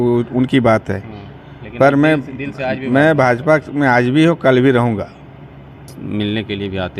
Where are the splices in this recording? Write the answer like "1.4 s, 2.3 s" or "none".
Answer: 6.0 s